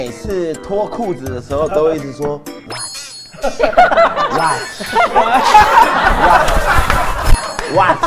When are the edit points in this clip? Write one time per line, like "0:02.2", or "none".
none